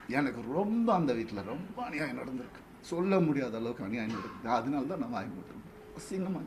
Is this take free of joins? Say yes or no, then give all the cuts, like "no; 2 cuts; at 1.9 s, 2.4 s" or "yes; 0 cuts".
yes; 0 cuts